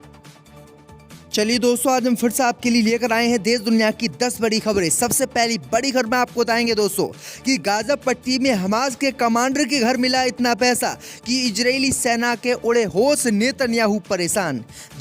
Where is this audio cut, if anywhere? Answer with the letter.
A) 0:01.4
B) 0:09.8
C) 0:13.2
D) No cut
A